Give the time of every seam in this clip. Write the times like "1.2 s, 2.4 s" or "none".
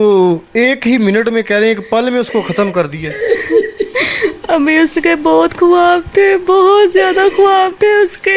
none